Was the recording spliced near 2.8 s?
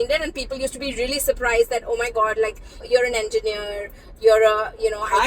yes; 1 cut; at 2.8 s

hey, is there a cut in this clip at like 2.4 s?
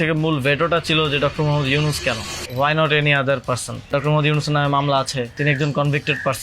yes; 3 cuts; at 2.4 s, 3.9 s, 5.4 s

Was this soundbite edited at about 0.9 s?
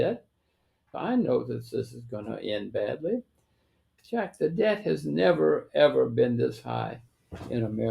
yes; 2 cuts; at 0.9 s, 3.9 s

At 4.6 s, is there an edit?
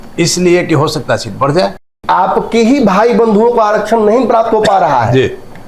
no; 1 cut; at 1.8 s

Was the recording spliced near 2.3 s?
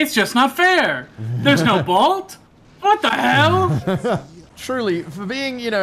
no; 1 cut; at 4.4 s

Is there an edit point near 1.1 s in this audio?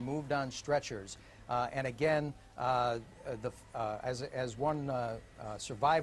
yes; 1 cut; at 1.1 s

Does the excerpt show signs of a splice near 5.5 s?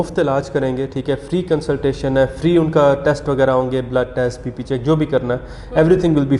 no; 0 cuts

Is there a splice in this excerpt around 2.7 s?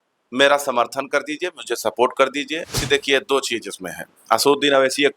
yes; 1 cut; at 2.7 s

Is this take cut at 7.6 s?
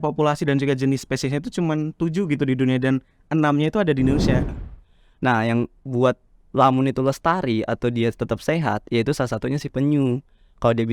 no; 1 cut; at 4.5 s

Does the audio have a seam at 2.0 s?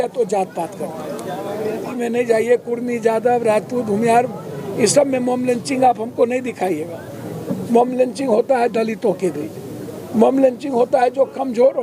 yes; 1 cut; at 2.0 s

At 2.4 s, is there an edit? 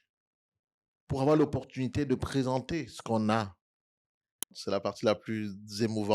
no; 1 cut; at 4.6 s

